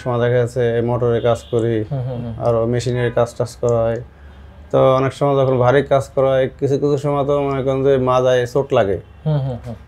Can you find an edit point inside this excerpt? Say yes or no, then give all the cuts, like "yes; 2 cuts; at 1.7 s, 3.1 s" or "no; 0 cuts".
no; 0 cuts